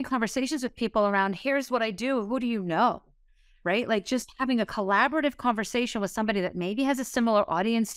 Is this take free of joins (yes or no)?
yes